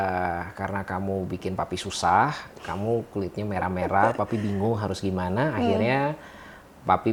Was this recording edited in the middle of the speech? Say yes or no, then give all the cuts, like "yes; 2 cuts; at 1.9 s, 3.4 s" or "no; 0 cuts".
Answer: no; 0 cuts